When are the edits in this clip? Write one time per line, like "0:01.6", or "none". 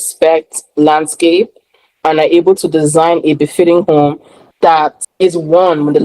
0:05.0